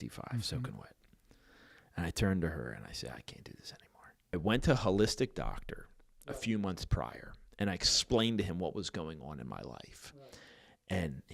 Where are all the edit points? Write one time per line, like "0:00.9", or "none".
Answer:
0:04.4